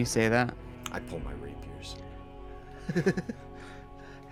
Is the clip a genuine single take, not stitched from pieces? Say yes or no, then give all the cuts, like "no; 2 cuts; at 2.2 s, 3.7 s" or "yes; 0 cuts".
yes; 0 cuts